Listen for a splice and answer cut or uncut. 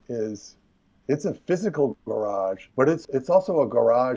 cut